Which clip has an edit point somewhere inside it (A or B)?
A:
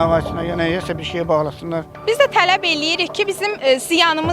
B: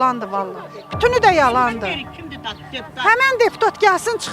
A